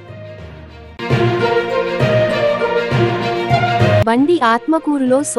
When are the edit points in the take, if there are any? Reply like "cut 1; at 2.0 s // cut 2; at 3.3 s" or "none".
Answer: cut 1; at 0.9 s // cut 2; at 4.0 s